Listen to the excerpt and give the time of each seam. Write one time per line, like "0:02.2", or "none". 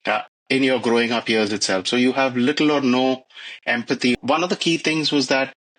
0:04.2